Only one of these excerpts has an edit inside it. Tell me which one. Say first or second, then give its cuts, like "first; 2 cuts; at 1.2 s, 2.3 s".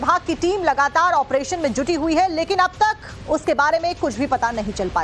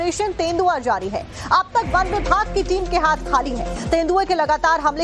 second; 1 cut; at 3.7 s